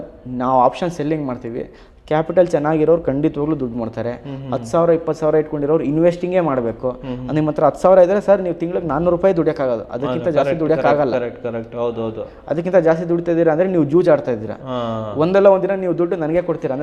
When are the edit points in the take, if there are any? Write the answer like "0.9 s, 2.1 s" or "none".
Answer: none